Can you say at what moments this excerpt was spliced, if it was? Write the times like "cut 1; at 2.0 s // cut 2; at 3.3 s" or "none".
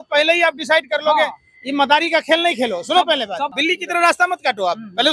cut 1; at 3.6 s